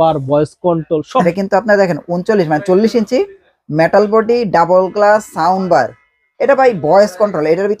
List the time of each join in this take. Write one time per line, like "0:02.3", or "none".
0:01.2